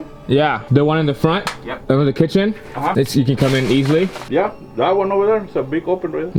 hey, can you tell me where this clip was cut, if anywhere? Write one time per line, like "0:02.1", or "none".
none